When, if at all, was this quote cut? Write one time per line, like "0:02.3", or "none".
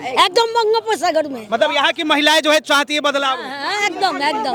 none